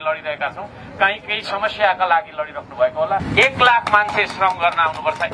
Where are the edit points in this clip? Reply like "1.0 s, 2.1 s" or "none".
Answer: 3.3 s